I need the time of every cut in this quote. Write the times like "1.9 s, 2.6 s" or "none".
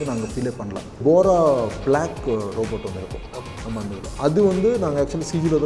1.0 s